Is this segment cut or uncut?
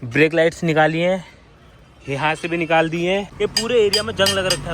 cut